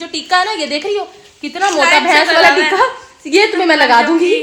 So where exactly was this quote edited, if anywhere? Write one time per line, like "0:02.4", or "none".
none